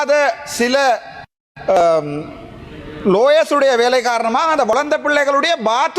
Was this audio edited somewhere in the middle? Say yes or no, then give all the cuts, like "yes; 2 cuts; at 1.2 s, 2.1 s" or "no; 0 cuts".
yes; 1 cut; at 4.7 s